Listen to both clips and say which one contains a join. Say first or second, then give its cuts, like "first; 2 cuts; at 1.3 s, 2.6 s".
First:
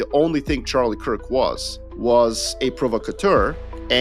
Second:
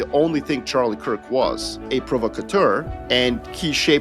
second; 2 cuts; at 1.8 s, 3.2 s